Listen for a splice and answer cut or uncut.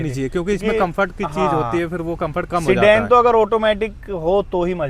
uncut